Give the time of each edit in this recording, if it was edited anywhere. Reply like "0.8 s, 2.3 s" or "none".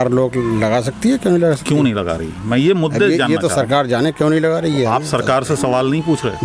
none

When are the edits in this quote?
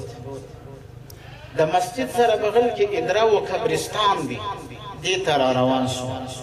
none

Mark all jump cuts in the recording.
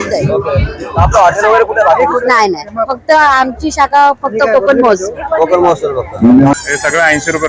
6.5 s

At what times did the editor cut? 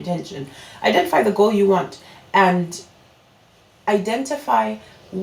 none

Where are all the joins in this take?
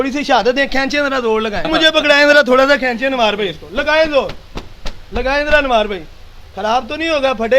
1.7 s

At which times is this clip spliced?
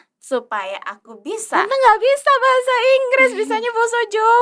1.5 s

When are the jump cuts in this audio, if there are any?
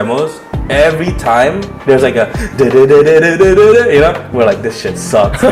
none

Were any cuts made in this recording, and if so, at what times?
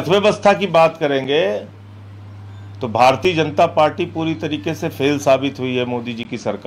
none

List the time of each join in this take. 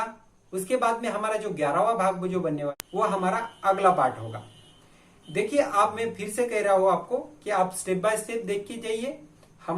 2.7 s

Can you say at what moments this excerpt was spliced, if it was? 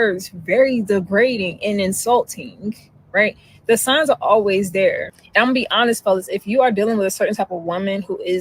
7.3 s

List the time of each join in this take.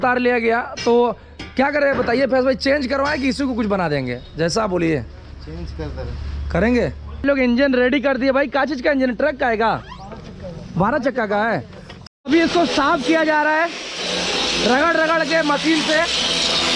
7.2 s, 11.9 s

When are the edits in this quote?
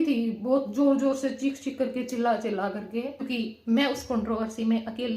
3.3 s

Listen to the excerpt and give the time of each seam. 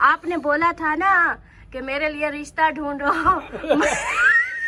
none

